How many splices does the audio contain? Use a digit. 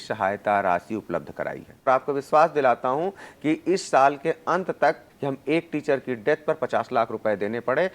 2